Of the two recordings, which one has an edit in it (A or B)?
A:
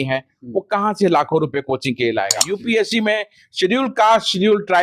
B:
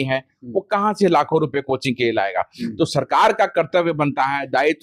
A